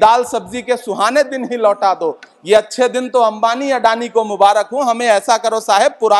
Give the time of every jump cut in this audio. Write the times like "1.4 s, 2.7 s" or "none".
none